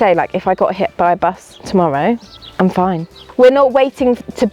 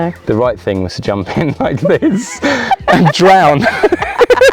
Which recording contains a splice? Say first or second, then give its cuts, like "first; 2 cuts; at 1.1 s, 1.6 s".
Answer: first; 2 cuts; at 2.4 s, 3.2 s